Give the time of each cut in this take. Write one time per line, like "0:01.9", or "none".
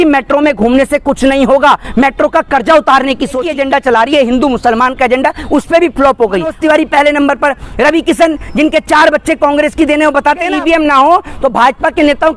0:03.4
0:06.5
0:10.5